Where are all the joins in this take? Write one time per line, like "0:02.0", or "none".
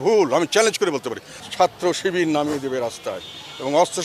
0:01.3